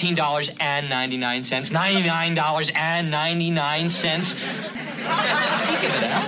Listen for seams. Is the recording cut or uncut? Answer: cut